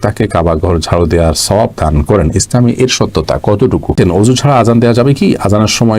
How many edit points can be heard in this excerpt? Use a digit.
1